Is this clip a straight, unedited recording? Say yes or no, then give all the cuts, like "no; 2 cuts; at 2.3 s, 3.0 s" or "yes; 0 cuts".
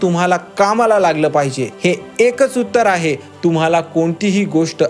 no; 1 cut; at 1.6 s